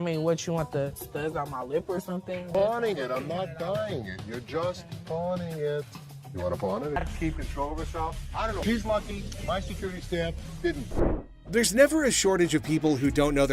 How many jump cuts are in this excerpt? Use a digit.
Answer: 2